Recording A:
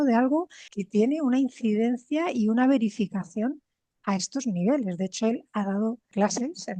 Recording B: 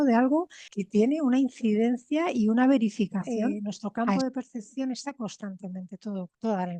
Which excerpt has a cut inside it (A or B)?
B